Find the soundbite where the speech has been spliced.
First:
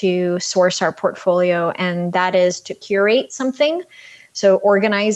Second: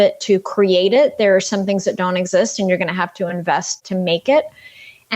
second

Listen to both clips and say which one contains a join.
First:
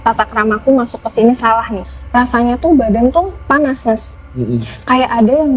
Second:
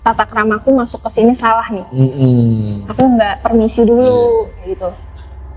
first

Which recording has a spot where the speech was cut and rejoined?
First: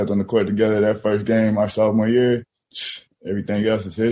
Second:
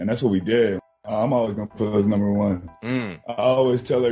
second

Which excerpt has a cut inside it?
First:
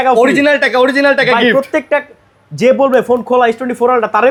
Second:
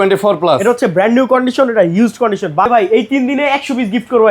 second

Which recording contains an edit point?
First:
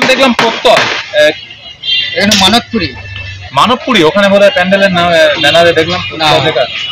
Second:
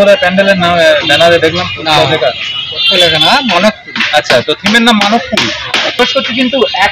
second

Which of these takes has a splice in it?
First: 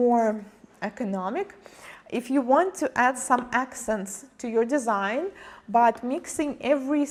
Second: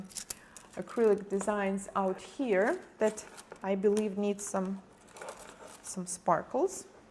second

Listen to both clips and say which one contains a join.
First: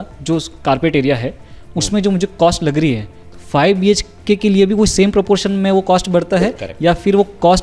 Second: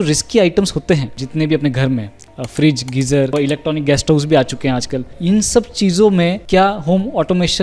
second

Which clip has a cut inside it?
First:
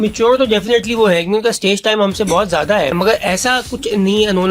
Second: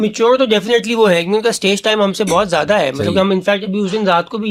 first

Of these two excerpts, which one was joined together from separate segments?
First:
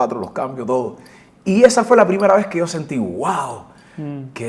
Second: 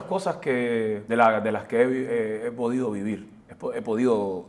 second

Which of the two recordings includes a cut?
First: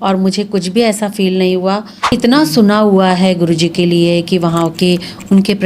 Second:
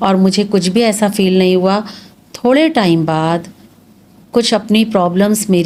first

